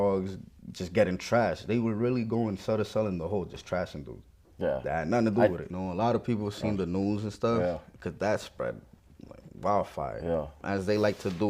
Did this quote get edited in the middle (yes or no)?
yes